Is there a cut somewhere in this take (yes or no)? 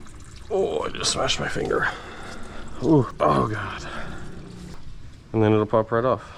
yes